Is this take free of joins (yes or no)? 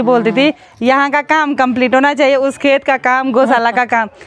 yes